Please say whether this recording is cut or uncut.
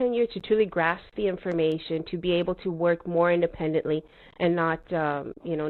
uncut